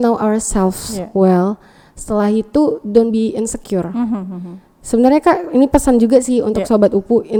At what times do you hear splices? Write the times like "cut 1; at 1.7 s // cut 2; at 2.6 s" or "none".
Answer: none